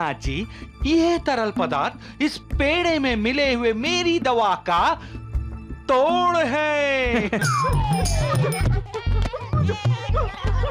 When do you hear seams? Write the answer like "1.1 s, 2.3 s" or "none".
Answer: 7.4 s